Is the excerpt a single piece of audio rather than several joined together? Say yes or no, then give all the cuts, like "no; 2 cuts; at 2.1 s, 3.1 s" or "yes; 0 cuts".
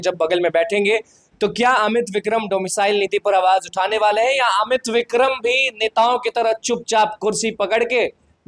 yes; 0 cuts